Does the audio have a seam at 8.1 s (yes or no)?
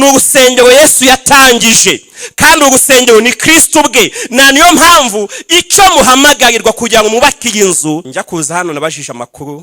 yes